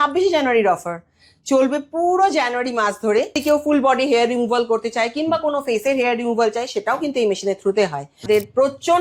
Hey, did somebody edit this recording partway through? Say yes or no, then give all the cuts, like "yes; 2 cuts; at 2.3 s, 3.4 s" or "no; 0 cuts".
yes; 2 cuts; at 3.4 s, 8.2 s